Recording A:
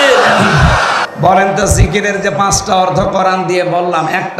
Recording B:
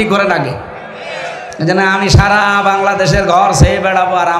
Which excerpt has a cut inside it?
A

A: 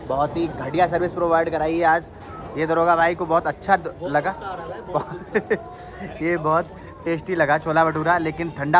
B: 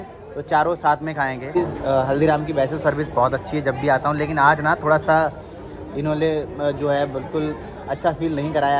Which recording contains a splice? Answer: B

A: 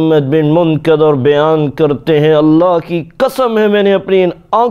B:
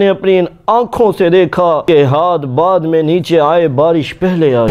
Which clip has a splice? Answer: B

